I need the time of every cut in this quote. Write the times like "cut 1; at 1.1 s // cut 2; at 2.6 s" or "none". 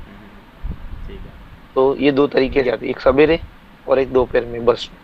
cut 1; at 2.6 s